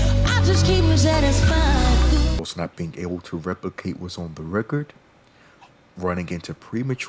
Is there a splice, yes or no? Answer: yes